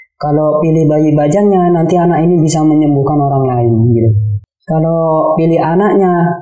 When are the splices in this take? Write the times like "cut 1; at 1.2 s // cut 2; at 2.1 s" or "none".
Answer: cut 1; at 4.3 s